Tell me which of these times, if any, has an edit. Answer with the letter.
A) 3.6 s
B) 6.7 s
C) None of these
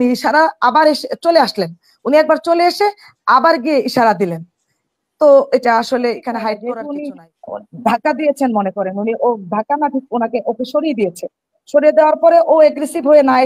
B